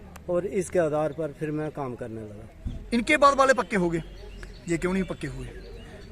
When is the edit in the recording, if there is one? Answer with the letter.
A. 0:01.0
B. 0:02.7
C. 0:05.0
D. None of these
B